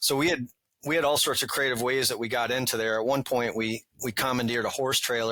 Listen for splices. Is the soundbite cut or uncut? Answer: uncut